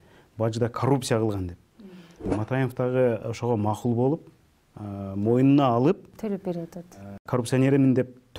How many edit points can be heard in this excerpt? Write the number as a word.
one